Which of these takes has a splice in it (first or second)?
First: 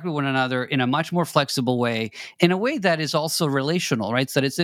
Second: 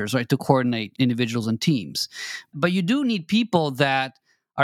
second